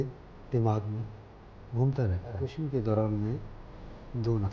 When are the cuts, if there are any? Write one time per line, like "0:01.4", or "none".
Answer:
0:02.5